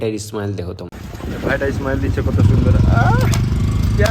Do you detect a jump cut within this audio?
yes; 1 cut; at 3.1 s

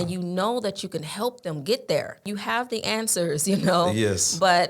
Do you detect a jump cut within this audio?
yes; 1 cut; at 2.3 s

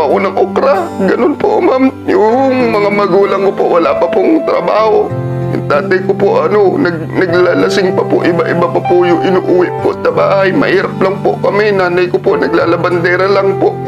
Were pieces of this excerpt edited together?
no; 0 cuts

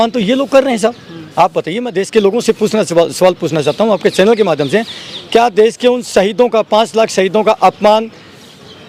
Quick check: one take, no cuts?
yes; 0 cuts

